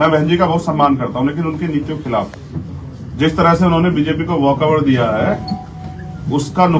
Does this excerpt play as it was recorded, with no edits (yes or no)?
yes